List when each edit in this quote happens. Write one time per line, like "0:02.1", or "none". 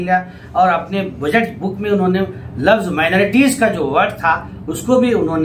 none